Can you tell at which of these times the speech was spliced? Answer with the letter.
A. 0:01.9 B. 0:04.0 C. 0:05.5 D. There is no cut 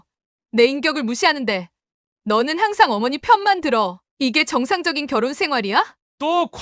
D